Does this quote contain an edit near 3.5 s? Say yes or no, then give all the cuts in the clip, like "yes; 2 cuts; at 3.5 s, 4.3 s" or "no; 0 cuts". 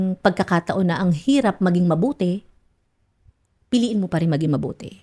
no; 0 cuts